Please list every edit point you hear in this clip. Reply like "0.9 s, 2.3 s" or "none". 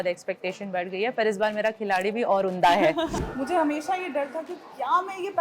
3.2 s